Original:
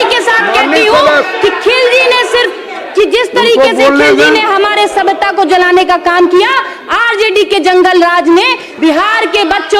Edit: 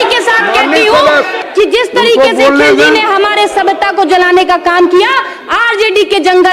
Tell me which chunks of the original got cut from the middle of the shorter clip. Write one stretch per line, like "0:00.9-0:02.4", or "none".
0:01.3-0:02.7